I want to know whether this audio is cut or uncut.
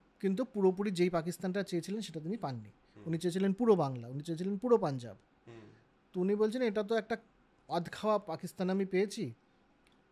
uncut